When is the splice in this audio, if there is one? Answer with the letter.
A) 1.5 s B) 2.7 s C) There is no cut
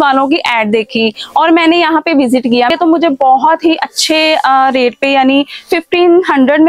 B